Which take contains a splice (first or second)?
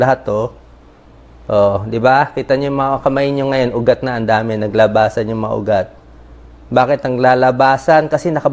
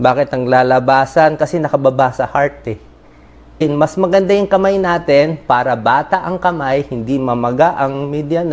second